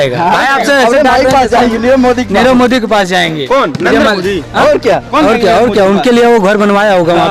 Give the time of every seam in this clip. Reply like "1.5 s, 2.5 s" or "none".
none